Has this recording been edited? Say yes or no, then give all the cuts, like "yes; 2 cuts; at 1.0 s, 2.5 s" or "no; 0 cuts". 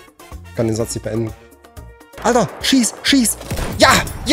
yes; 1 cut; at 2.1 s